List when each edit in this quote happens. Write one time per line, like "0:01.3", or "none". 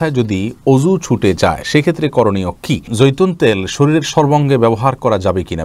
0:02.9